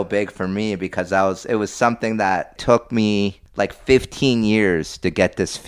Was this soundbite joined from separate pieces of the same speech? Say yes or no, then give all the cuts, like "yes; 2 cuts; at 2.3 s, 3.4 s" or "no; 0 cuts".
yes; 2 cuts; at 2.6 s, 3.4 s